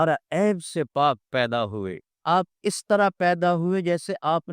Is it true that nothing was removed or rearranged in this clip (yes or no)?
no